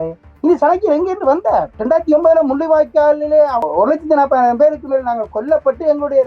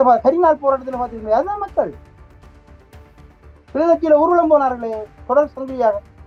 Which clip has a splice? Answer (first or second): first